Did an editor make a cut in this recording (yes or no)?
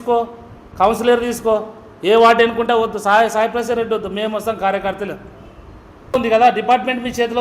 yes